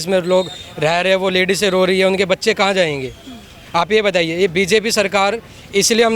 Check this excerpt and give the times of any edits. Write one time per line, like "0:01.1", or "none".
none